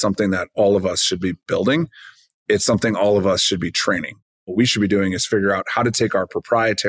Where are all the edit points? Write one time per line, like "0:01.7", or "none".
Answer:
0:04.3